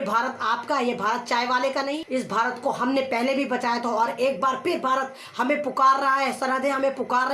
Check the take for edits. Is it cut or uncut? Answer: cut